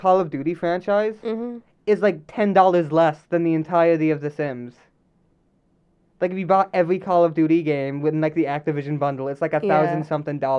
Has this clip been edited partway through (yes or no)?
no